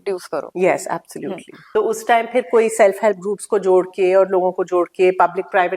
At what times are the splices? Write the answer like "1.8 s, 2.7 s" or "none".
1.5 s

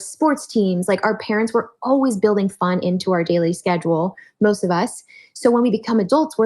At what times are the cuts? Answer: none

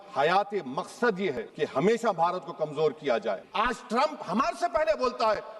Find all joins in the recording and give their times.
3.4 s

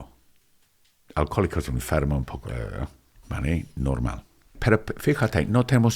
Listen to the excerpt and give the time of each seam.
4.6 s

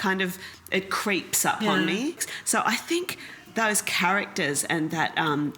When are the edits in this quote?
2.3 s

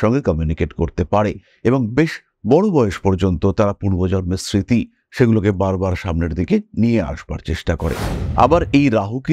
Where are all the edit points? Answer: 8.1 s

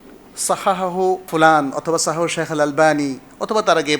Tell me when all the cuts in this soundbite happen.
1.3 s

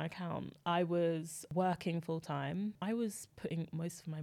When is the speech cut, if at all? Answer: 1.4 s, 2.8 s

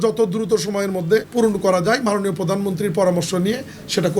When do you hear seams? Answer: 1.3 s

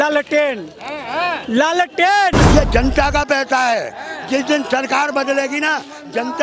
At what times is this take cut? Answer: 2.4 s

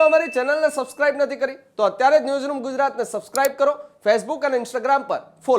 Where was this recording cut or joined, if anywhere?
none

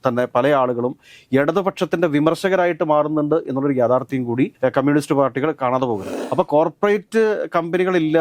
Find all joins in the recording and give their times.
6.1 s

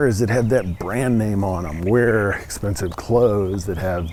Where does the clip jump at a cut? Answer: none

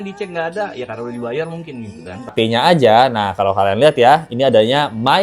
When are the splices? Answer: 2.3 s

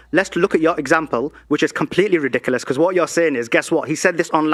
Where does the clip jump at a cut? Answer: none

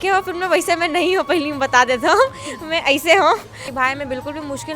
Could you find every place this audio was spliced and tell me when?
3.7 s

